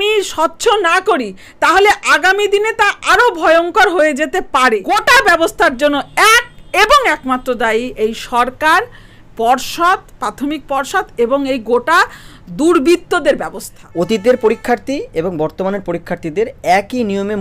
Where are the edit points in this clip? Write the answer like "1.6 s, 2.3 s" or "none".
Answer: 4.8 s, 13.8 s